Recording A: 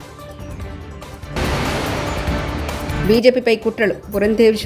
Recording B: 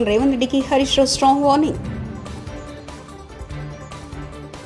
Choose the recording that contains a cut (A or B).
A